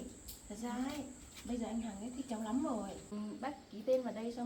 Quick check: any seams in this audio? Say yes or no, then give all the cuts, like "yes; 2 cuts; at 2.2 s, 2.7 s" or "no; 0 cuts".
yes; 1 cut; at 3.1 s